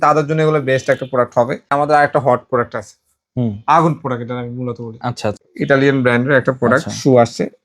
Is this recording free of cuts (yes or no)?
no